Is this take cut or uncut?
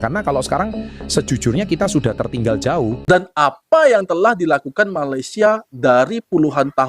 cut